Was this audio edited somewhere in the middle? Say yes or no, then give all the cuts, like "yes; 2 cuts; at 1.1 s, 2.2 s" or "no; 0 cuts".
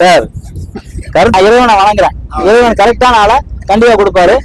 yes; 1 cut; at 1.3 s